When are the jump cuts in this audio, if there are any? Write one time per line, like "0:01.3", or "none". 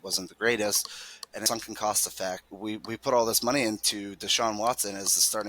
0:01.5
0:02.5